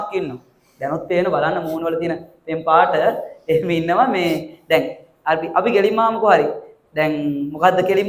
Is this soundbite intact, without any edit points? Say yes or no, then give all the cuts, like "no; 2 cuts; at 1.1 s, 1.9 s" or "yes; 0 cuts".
yes; 0 cuts